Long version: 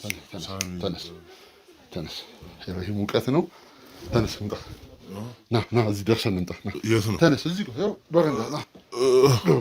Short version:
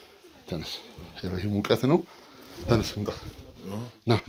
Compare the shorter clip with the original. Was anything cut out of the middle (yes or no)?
no